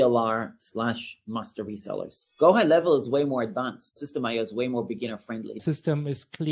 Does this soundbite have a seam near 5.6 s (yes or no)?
yes